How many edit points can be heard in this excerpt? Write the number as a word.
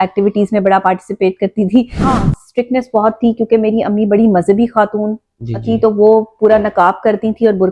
one